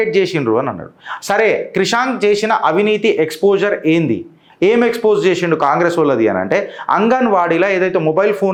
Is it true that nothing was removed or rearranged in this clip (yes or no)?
yes